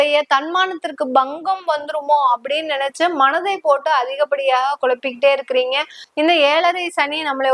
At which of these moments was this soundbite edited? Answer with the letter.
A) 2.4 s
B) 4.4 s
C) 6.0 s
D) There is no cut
C